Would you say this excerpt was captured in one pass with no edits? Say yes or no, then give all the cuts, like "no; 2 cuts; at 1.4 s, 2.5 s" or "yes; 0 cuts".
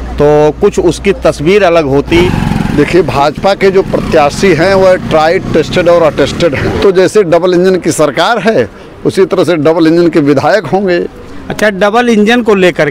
no; 2 cuts; at 2.2 s, 6.7 s